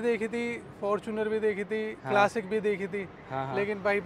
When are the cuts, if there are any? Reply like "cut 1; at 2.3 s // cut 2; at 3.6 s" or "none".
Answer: none